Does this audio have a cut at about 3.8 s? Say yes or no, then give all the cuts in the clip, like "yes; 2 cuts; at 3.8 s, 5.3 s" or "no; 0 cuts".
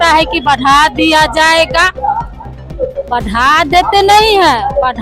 no; 0 cuts